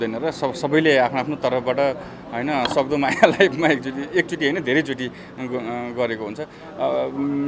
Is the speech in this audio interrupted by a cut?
no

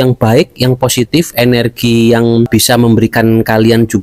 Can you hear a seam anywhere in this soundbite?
yes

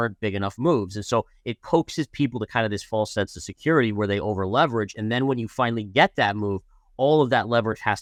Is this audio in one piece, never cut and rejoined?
yes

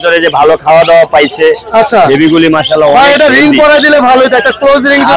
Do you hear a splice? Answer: no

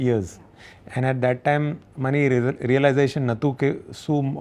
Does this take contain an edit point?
no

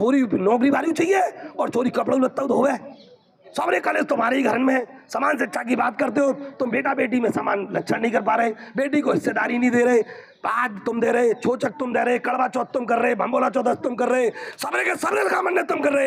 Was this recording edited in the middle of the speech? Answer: no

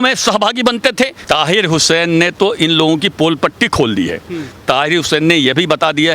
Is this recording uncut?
no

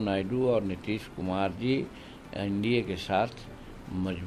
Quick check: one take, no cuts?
yes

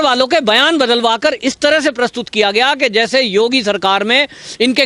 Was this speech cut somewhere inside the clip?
no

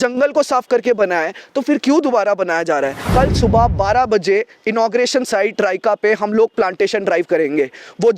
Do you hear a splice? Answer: yes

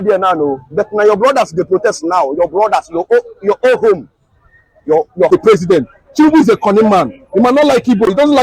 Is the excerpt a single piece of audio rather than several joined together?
no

